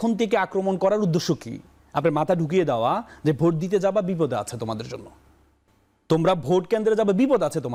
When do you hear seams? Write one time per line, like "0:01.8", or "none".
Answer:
none